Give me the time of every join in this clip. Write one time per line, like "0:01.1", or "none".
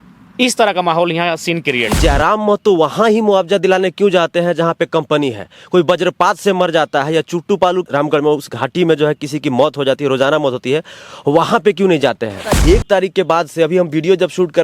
0:01.9
0:07.9
0:12.6